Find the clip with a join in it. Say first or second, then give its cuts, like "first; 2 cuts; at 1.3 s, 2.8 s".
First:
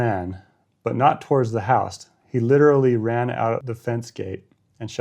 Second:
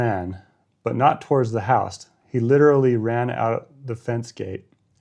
first; 1 cut; at 3.7 s